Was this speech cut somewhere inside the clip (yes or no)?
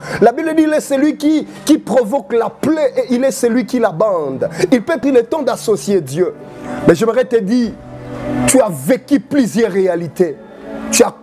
yes